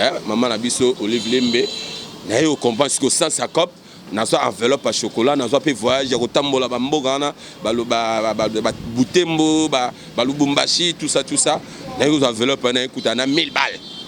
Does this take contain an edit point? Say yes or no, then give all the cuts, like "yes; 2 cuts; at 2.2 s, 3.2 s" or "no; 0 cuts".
no; 0 cuts